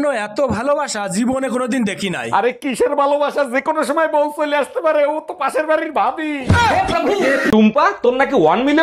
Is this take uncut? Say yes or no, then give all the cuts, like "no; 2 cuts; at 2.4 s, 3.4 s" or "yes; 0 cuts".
no; 1 cut; at 7.5 s